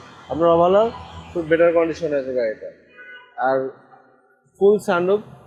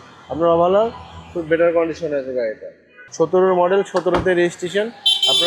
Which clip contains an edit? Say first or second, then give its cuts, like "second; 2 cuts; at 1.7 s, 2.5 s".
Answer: second; 1 cut; at 3.0 s